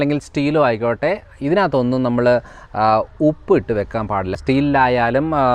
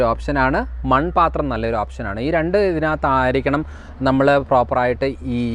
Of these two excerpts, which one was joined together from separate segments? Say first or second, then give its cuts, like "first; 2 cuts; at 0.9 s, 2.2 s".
first; 1 cut; at 4.3 s